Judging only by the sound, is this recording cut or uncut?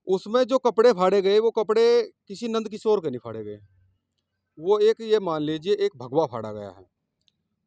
uncut